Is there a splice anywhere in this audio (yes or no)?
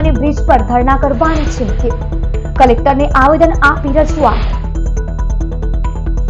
no